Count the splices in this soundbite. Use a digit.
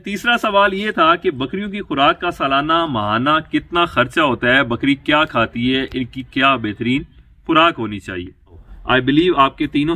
1